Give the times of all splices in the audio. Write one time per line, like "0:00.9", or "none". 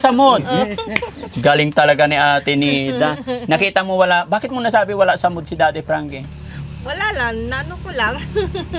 none

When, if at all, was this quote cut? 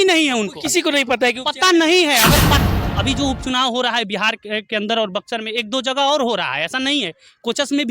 0:02.6

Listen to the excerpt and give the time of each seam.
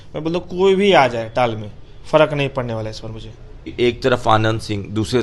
0:03.7

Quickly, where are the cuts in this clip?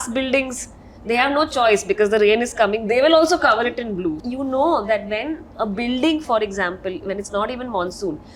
0:04.2

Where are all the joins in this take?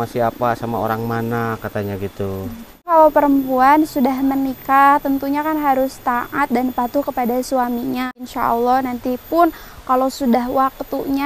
0:02.9
0:08.2

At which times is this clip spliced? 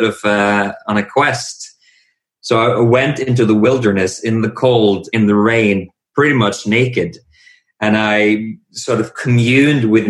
none

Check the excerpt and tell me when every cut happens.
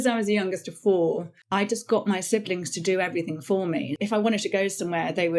0:01.3
0:03.9

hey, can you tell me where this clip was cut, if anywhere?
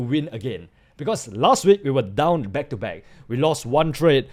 none

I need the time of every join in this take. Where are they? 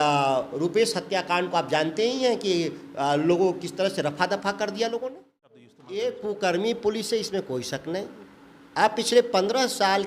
0:05.8

